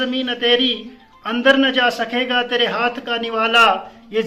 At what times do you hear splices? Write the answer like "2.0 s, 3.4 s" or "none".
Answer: none